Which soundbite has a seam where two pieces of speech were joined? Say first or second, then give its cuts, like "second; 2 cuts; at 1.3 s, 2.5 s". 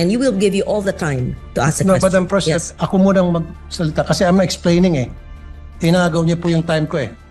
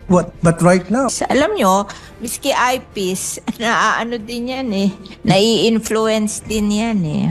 second; 1 cut; at 1.1 s